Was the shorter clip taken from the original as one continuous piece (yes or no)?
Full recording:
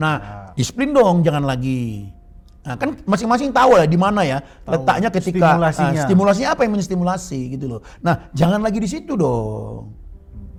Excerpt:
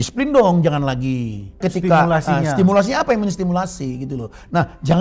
no